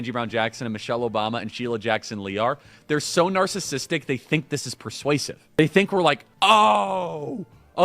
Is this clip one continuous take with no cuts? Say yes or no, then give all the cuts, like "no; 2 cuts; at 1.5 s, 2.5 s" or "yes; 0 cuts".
no; 2 cuts; at 5.6 s, 6.3 s